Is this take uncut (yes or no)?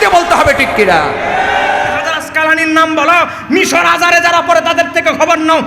no